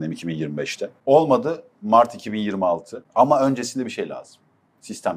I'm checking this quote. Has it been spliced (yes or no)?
yes